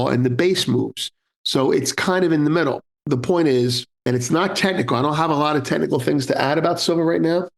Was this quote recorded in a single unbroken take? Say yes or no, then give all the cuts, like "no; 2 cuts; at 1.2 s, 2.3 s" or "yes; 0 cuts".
no; 2 cuts; at 2.9 s, 3.9 s